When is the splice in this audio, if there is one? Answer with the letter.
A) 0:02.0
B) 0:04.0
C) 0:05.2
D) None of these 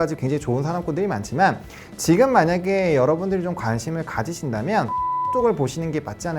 C